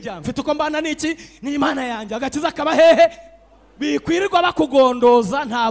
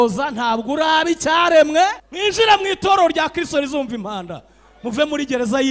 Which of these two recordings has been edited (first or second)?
second